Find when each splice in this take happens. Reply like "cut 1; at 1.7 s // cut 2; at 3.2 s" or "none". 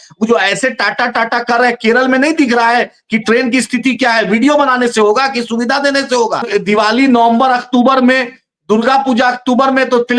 cut 1; at 6.5 s